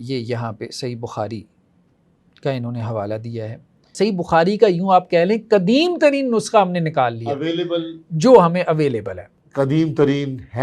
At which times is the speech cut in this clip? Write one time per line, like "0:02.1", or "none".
0:03.9

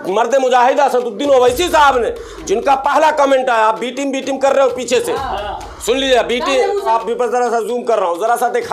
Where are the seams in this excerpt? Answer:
0:06.9

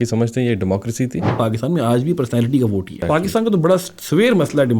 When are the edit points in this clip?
0:01.3
0:03.0

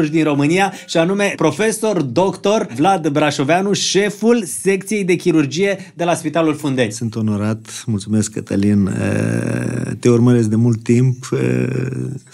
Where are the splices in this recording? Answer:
0:01.3
0:02.7
0:06.9

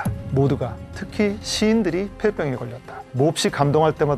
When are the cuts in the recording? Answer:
none

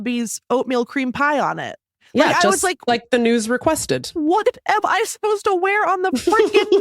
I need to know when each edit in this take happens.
none

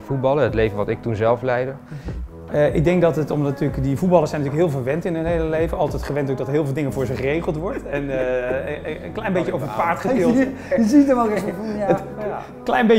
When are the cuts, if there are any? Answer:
0:02.3

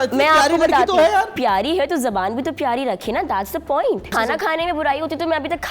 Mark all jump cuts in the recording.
0:01.3
0:04.1

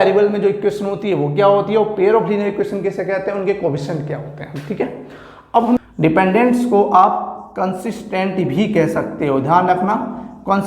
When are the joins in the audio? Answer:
0:05.8

